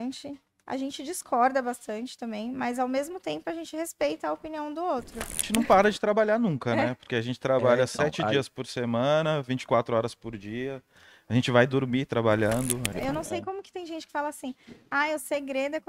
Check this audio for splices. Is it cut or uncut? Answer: cut